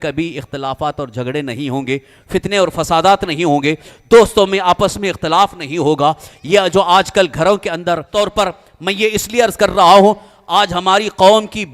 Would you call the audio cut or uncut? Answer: cut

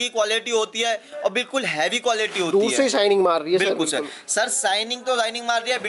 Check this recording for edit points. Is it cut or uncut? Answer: uncut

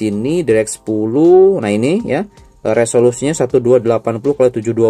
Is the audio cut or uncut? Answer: uncut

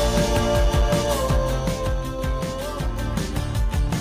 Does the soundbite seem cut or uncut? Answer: uncut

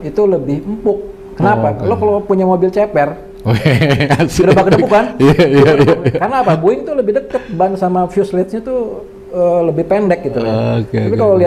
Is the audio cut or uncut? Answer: uncut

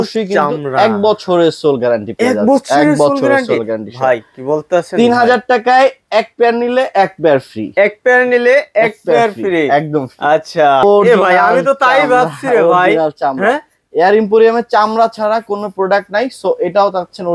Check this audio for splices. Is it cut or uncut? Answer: cut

